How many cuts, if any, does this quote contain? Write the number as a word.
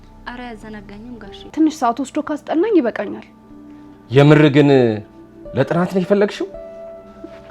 one